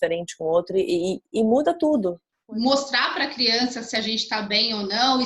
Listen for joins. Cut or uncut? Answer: cut